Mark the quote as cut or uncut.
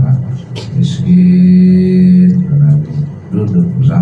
uncut